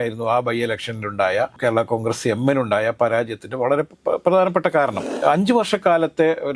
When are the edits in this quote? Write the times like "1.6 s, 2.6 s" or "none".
5.1 s

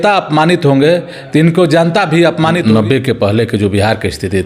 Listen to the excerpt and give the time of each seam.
2.6 s

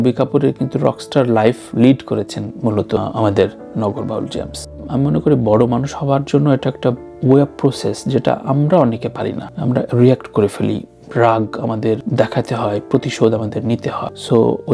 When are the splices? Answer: 4.7 s

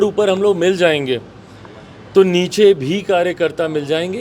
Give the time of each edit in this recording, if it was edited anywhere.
none

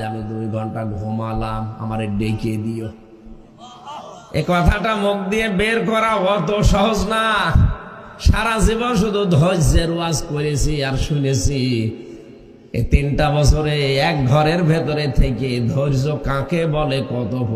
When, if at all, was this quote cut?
none

